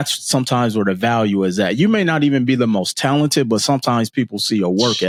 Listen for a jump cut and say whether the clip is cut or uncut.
uncut